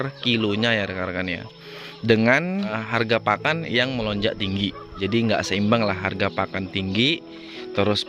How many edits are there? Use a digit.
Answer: 2